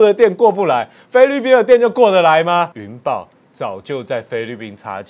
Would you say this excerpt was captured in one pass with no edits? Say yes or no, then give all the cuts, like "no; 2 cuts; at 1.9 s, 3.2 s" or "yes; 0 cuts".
no; 1 cut; at 2.8 s